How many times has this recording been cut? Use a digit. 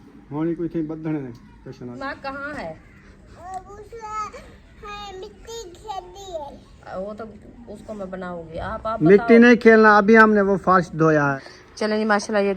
2